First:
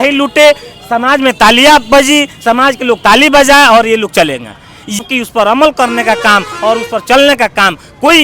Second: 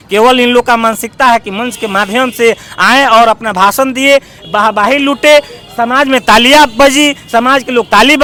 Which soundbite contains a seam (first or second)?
first